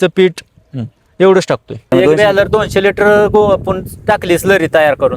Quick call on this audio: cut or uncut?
cut